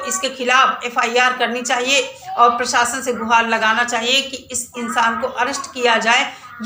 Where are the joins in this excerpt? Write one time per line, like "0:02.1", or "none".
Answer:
none